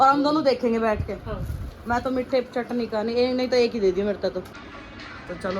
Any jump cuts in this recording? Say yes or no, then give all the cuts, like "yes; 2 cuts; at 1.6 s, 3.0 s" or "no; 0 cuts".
yes; 1 cut; at 4.5 s